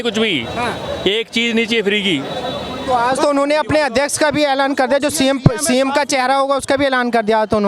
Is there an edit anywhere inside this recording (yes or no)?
no